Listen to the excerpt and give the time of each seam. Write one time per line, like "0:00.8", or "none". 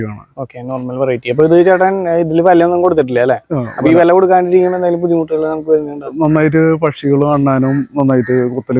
none